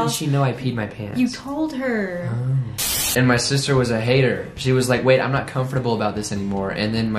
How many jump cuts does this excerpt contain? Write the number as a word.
one